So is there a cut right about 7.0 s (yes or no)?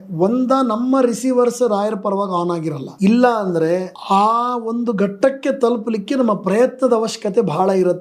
no